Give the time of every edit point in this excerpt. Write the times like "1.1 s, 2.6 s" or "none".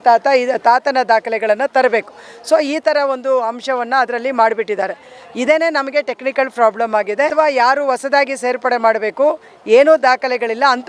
7.3 s